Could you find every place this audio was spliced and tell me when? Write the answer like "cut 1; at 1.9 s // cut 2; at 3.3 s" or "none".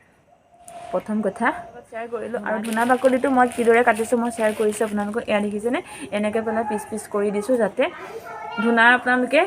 cut 1; at 2.2 s